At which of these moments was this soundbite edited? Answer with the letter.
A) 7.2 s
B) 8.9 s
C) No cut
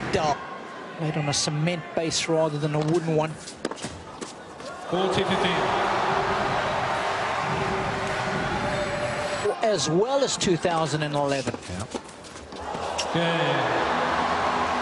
A